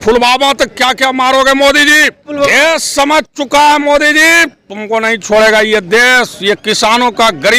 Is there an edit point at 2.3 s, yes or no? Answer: yes